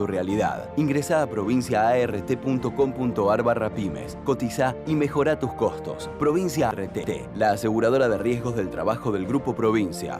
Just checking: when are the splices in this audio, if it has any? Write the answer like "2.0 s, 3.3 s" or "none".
6.8 s